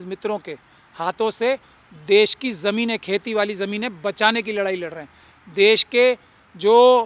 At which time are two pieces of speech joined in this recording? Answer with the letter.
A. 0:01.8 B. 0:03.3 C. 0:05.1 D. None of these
D